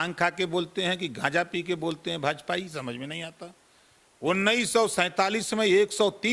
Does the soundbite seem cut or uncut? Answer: uncut